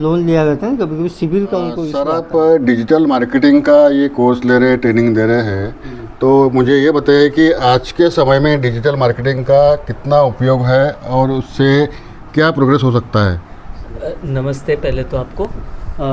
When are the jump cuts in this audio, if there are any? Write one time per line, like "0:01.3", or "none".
0:01.8